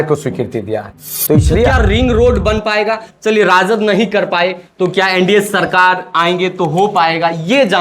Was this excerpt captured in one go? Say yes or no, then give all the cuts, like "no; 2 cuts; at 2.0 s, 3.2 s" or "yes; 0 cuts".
no; 1 cut; at 1.7 s